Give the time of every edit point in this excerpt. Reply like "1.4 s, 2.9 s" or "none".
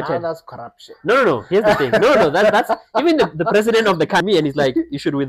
4.2 s

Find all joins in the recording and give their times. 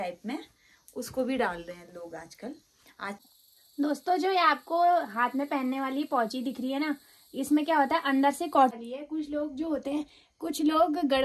3.2 s, 8.7 s

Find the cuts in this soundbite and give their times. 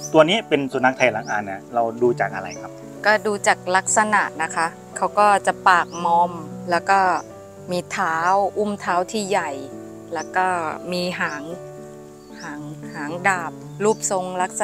none

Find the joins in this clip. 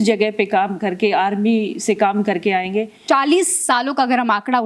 2.9 s

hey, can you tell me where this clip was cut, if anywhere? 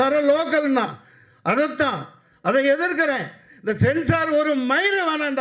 none

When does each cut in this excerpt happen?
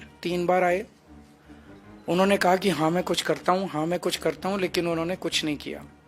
none

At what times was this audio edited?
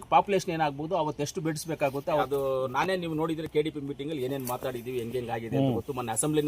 2.3 s

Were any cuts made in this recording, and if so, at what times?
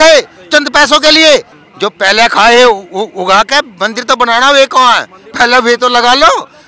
1.6 s

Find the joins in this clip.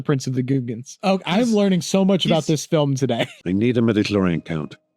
3.3 s

